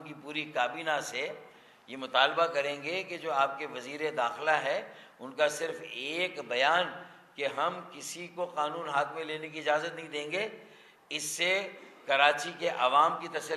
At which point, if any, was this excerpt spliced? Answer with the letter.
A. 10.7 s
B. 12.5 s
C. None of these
C